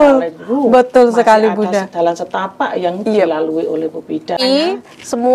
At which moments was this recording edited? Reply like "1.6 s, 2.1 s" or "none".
4.4 s